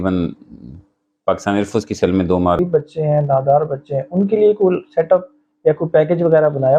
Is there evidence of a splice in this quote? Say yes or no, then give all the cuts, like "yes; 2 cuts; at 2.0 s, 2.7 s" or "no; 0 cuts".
yes; 1 cut; at 2.6 s